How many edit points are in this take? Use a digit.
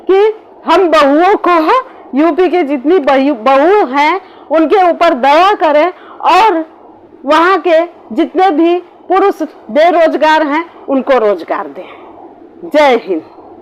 0